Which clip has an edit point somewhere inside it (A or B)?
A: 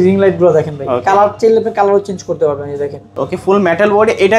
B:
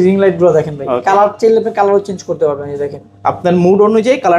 A